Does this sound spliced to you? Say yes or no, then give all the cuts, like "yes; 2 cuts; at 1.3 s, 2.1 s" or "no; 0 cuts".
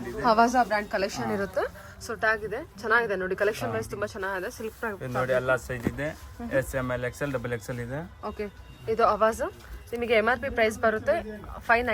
no; 0 cuts